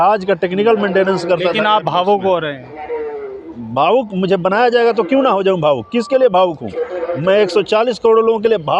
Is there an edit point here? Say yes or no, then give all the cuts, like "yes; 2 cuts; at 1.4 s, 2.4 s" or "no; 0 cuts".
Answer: no; 0 cuts